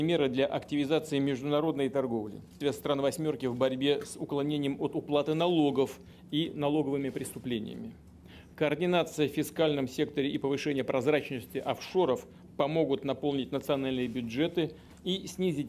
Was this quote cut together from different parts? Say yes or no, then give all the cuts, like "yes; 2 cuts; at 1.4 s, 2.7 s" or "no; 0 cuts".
no; 0 cuts